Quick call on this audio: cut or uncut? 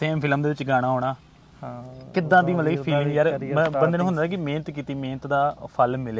uncut